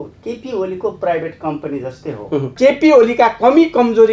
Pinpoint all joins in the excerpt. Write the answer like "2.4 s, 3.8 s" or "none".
2.5 s